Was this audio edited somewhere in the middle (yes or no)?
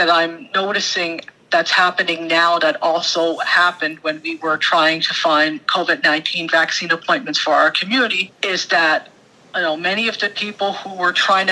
no